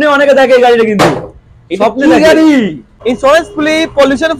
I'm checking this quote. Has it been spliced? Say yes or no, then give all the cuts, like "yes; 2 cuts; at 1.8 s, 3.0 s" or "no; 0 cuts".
yes; 1 cut; at 2.9 s